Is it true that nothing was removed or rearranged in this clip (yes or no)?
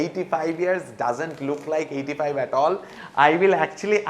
no